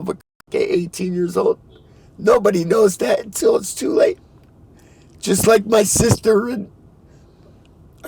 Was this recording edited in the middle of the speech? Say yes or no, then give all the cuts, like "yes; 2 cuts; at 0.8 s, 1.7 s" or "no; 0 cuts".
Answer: no; 0 cuts